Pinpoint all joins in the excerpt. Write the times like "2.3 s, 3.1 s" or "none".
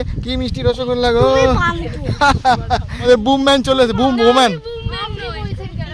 3.1 s